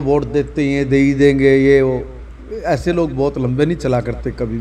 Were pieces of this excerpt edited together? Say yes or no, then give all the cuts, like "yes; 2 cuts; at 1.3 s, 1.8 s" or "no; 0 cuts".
no; 0 cuts